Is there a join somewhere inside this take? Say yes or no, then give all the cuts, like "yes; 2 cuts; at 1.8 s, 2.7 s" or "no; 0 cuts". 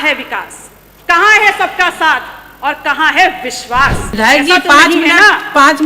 yes; 1 cut; at 4.1 s